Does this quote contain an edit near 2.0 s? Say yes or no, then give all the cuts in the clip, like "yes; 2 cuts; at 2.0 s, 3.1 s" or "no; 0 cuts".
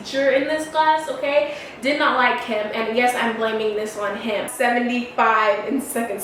no; 1 cut; at 4.5 s